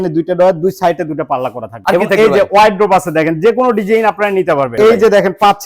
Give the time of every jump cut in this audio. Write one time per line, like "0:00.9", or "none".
0:01.8
0:04.7